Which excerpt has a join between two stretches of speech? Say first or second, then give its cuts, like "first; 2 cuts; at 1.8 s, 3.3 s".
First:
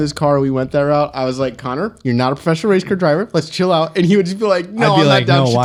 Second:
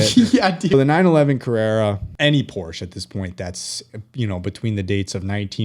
second; 2 cuts; at 0.7 s, 2.1 s